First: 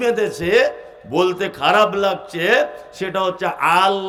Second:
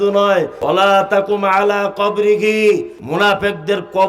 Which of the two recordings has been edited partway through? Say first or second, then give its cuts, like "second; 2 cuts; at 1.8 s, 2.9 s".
second; 2 cuts; at 0.7 s, 2.7 s